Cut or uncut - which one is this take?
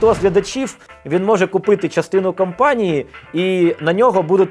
uncut